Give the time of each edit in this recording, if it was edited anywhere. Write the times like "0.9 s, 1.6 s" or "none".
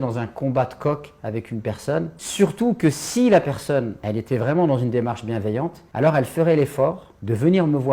none